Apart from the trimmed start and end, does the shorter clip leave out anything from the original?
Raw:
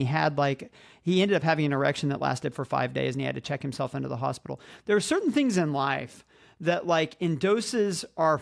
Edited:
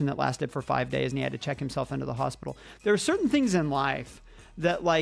no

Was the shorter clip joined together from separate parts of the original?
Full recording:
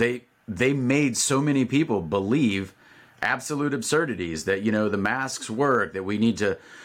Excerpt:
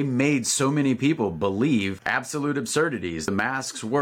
yes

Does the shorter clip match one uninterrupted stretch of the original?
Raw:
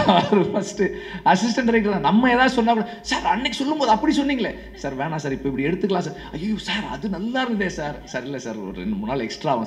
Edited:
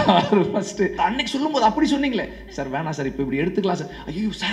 no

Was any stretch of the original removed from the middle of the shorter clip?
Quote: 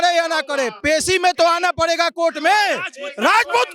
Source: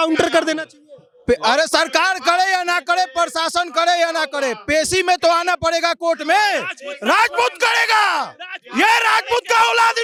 no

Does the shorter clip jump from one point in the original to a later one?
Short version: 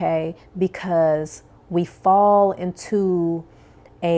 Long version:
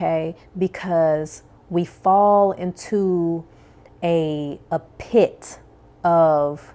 no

